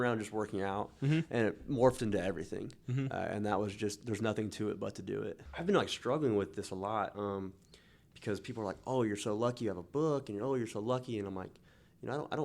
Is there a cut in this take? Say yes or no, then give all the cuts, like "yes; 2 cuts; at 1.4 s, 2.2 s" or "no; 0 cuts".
yes; 1 cut; at 5.4 s